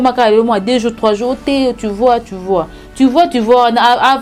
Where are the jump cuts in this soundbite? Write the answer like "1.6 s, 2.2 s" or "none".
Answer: none